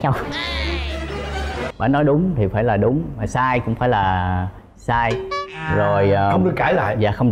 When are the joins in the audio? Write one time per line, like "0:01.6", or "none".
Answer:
0:01.6